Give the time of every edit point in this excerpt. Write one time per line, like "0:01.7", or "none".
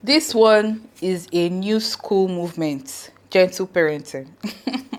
none